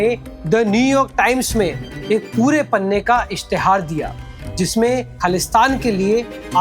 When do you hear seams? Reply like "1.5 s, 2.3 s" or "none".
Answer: 5.1 s